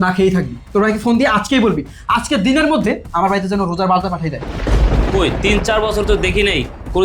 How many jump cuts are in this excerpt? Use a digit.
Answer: 1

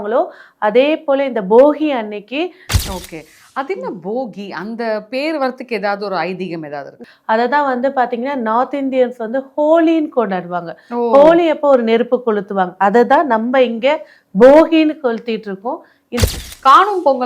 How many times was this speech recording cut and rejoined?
3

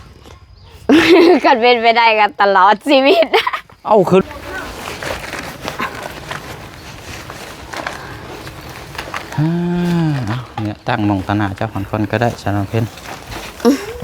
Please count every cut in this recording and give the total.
1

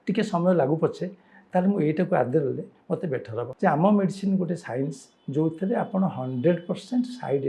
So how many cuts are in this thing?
1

